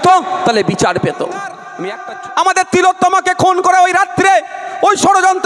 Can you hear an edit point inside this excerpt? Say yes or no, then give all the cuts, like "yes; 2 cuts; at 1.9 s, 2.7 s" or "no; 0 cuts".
yes; 1 cut; at 1.6 s